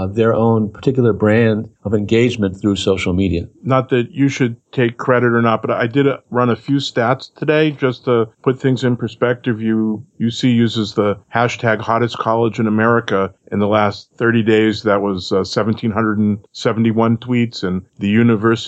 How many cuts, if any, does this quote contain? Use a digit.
0